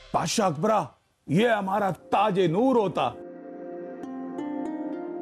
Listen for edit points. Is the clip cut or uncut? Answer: uncut